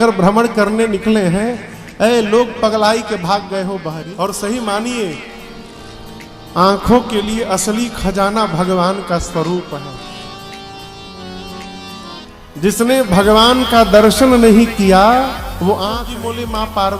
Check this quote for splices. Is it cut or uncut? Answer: cut